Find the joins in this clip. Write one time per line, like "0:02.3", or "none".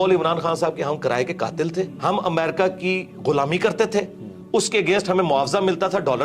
0:01.9